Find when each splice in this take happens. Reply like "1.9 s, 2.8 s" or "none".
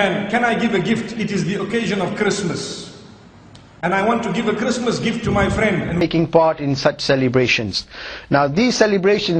6.0 s